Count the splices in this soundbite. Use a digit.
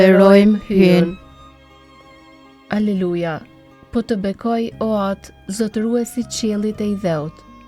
2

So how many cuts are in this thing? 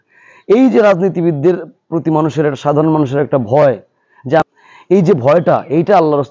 1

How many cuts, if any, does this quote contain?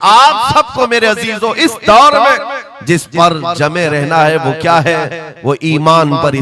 0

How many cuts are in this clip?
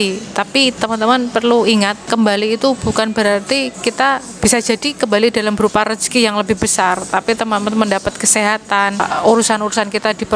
2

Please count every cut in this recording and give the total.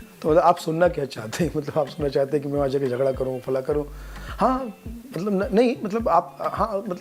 0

